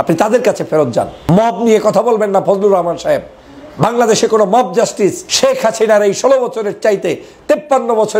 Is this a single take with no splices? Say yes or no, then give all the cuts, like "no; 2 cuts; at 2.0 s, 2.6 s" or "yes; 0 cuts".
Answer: no; 2 cuts; at 1.2 s, 5.3 s